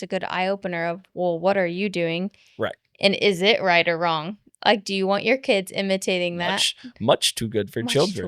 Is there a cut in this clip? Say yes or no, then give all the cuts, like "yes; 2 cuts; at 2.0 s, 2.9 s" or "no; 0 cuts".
no; 0 cuts